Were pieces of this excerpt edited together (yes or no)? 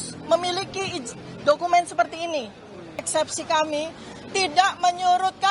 yes